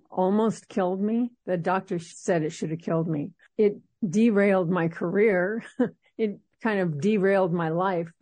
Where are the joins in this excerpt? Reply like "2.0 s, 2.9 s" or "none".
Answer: 3.4 s